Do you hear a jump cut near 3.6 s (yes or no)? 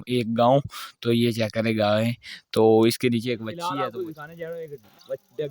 yes